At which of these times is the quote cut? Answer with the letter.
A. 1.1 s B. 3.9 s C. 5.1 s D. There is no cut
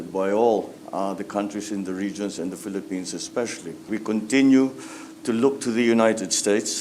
B